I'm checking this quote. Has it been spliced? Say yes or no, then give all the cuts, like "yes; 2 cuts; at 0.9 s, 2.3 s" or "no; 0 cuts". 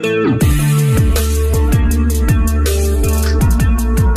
no; 0 cuts